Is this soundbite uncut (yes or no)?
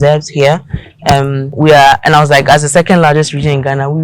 no